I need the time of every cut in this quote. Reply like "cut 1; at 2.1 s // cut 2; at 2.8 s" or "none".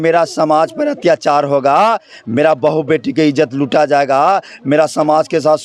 none